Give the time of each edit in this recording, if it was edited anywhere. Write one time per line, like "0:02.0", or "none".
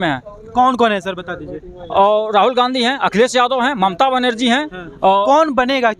none